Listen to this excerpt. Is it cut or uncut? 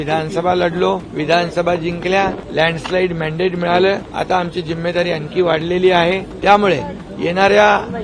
cut